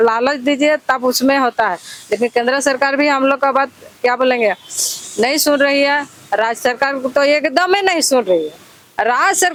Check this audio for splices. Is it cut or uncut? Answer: uncut